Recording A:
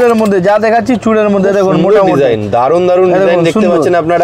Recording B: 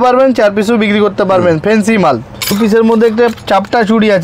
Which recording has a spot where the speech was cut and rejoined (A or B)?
B